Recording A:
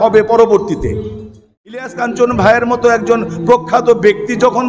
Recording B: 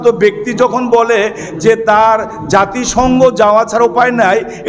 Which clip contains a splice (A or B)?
A